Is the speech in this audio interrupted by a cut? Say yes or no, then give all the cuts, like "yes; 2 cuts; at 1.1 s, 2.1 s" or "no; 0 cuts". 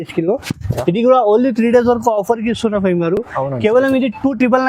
no; 0 cuts